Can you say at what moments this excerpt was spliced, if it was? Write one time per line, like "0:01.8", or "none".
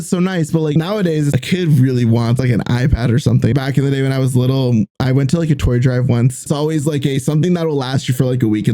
0:00.8
0:02.4
0:03.5
0:06.4